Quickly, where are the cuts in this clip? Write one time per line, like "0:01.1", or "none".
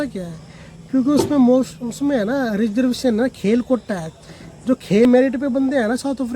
0:05.1

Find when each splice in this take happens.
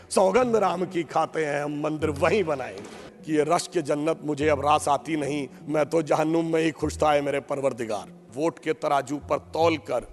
0:03.1
0:08.3

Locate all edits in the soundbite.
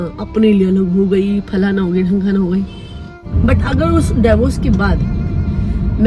0:03.2

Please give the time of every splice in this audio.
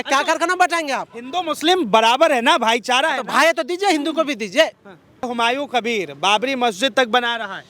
0:05.3

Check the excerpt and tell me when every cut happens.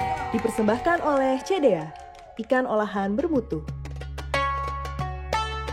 0:03.9

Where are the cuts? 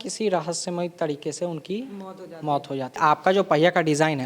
0:03.0

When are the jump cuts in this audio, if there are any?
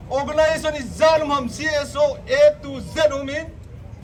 none

